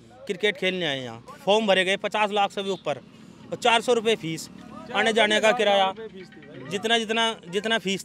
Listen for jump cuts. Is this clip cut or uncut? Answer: cut